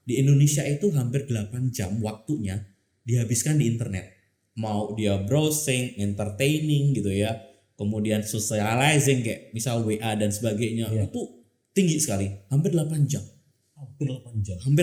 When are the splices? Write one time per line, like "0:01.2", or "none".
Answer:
none